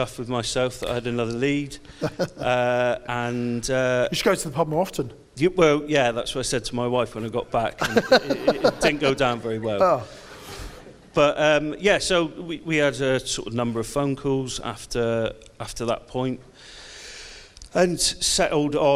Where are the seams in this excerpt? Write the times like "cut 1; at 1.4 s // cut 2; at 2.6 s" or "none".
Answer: none